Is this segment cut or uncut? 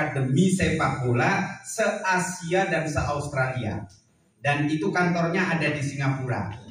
uncut